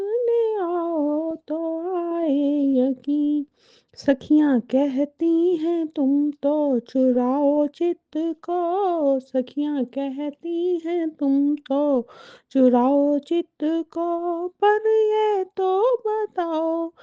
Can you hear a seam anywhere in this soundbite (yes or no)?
yes